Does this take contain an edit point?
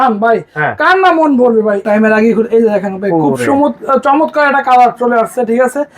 yes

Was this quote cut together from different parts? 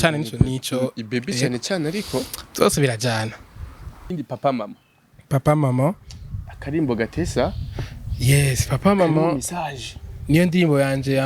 yes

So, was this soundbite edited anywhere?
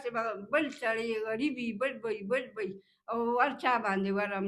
no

